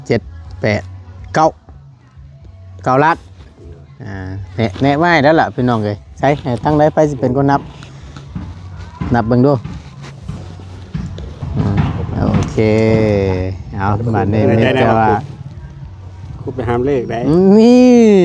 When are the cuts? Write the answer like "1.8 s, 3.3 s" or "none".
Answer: 11.8 s